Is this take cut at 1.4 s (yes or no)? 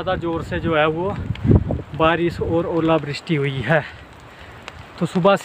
no